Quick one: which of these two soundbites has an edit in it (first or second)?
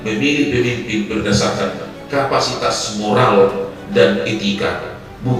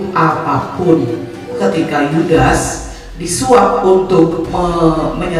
second